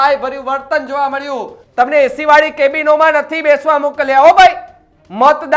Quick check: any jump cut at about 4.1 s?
no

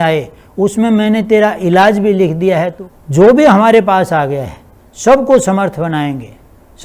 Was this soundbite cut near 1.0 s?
no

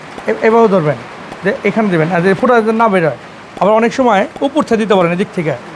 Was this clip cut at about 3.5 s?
no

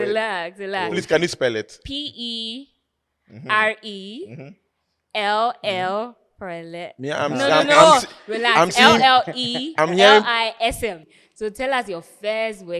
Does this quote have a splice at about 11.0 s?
yes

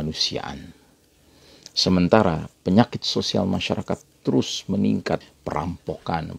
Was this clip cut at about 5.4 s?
yes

